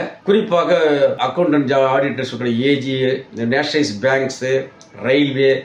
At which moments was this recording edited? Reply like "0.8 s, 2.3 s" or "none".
none